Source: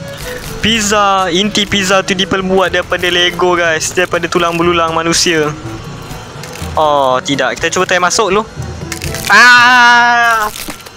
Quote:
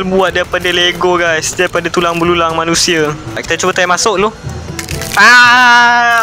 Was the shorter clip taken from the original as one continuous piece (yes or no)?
no